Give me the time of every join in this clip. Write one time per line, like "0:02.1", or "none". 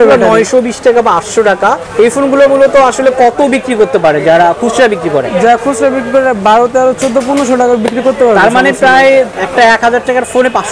0:01.8
0:09.4